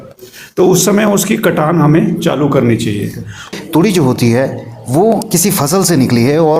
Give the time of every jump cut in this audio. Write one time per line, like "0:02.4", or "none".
0:03.5

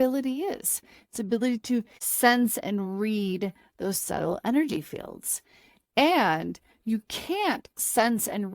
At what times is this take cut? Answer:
0:02.0

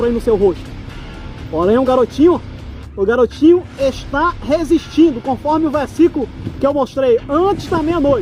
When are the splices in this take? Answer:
none

